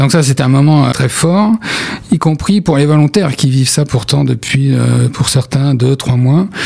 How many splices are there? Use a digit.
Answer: 1